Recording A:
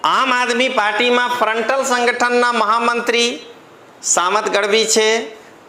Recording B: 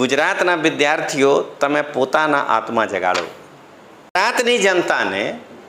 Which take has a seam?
B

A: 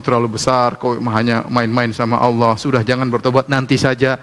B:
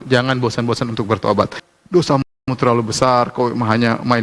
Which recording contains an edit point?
B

